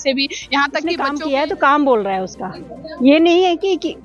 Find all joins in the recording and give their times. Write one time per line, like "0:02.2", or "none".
0:01.1